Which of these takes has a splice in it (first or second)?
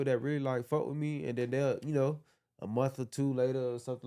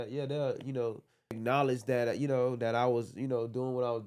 second